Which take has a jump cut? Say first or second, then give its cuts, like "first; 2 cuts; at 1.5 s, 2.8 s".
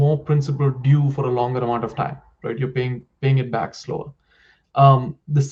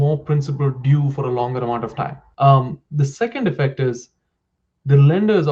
second; 1 cut; at 2.2 s